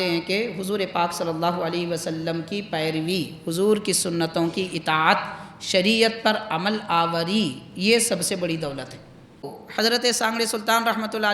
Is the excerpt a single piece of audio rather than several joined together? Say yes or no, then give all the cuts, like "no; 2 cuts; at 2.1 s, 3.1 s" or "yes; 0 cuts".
no; 1 cut; at 9.6 s